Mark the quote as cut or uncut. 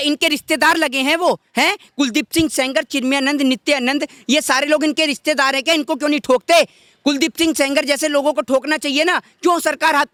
uncut